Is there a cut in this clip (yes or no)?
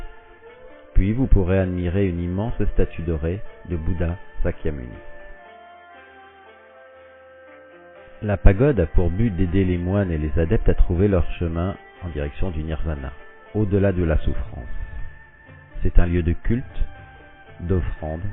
yes